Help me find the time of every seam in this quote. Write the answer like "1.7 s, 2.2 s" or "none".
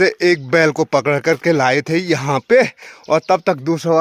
none